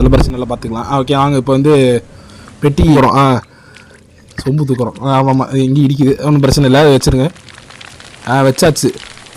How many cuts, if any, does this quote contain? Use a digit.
1